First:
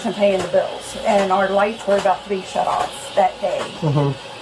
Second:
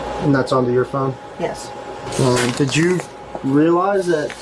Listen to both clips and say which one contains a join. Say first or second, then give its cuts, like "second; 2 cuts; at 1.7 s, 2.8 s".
second; 1 cut; at 2.0 s